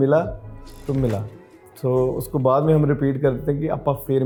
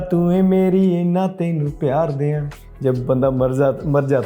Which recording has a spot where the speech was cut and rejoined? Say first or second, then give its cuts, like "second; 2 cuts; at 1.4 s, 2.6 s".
second; 1 cut; at 2.5 s